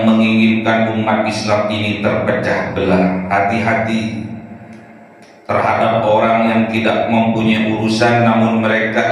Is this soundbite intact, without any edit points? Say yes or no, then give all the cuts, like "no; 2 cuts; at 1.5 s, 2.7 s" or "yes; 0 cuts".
yes; 0 cuts